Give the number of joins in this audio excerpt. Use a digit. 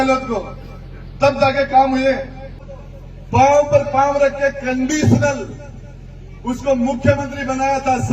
1